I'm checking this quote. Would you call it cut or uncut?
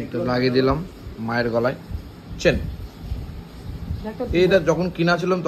uncut